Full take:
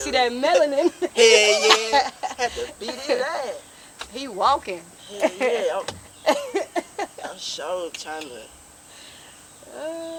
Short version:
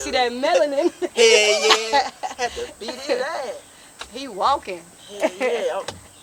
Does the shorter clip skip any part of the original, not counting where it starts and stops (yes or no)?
no